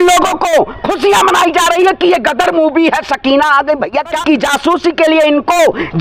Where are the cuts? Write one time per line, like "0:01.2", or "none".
0:04.2